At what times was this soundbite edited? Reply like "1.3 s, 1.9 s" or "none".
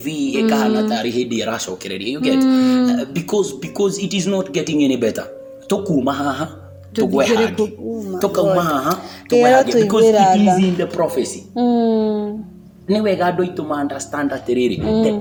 none